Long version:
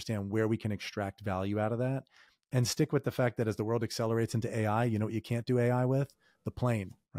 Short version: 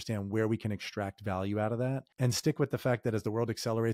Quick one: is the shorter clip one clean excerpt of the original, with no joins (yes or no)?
no